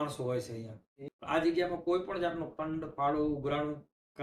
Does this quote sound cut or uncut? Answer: cut